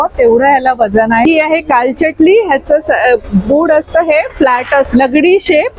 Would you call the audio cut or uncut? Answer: cut